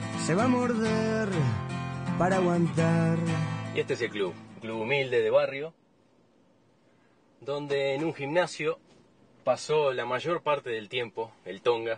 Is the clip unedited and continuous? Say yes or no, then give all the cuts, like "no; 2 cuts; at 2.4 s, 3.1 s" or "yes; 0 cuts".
yes; 0 cuts